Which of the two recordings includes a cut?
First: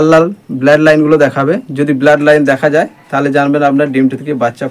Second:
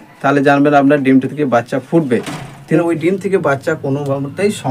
second; 1 cut; at 2.8 s

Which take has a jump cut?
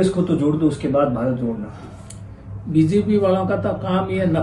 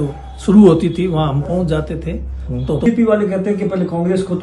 second; 1 cut; at 2.9 s

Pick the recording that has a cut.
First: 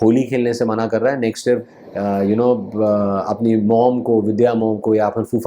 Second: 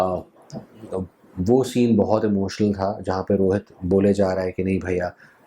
first; 1 cut; at 1.8 s

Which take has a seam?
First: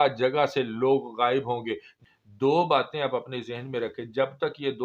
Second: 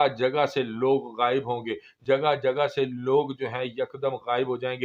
first; 1 cut; at 1.9 s

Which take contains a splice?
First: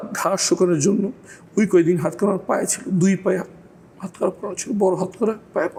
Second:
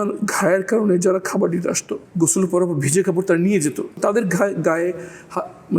second; 2 cuts; at 1.9 s, 4.0 s

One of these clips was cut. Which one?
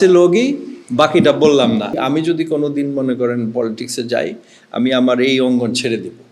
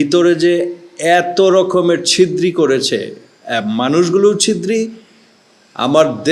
first; 1 cut; at 2.0 s

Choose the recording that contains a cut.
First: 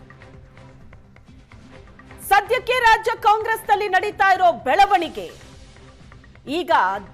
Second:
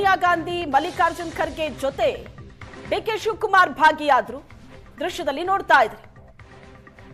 first; 1 cut; at 2.2 s

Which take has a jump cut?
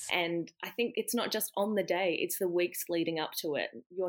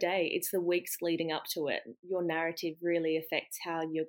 first; 1 cut; at 0.9 s

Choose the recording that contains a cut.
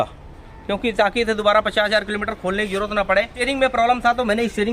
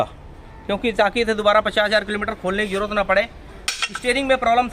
first; 1 cut; at 3.3 s

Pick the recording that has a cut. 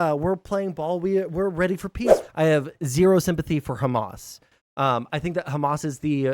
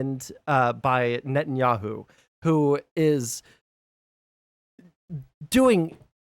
first; 1 cut; at 2.2 s

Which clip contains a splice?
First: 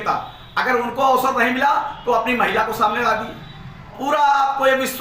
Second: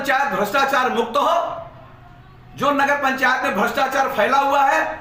first; 1 cut; at 4.0 s

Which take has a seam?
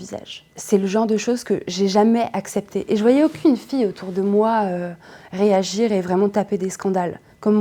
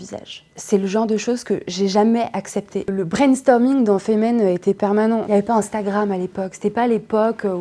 second; 1 cut; at 2.8 s

